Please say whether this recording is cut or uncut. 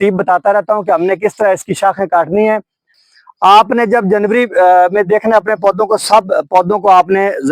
cut